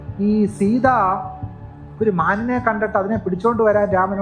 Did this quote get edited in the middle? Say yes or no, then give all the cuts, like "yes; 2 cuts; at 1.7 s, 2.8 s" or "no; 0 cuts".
no; 0 cuts